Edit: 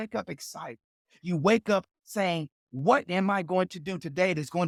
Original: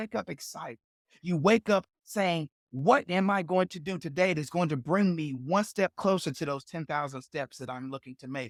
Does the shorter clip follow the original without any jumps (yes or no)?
yes